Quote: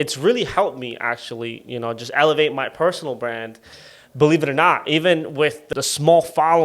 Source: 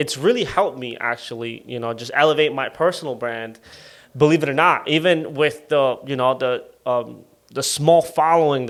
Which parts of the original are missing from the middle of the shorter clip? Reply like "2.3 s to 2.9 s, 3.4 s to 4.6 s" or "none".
5.6 s to 7.4 s